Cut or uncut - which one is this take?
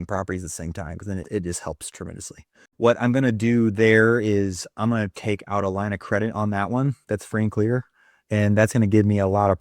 cut